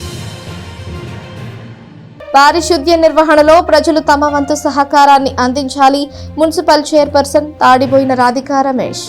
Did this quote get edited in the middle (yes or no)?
yes